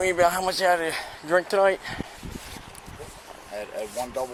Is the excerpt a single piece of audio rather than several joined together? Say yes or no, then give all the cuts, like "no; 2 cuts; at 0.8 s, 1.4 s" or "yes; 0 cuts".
yes; 0 cuts